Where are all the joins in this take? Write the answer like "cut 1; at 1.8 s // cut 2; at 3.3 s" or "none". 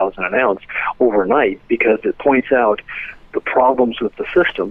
none